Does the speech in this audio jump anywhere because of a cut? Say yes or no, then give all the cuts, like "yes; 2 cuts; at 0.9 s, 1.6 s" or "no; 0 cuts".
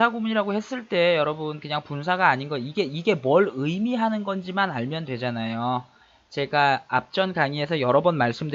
yes; 1 cut; at 2.9 s